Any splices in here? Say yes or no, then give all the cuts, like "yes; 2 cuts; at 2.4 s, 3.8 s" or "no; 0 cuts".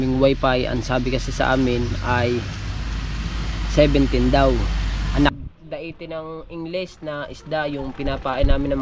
yes; 1 cut; at 5.3 s